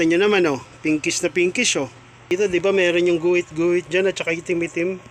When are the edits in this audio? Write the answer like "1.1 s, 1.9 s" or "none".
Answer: 2.3 s